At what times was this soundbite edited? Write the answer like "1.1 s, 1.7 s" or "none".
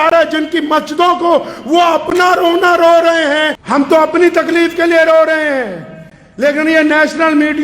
3.6 s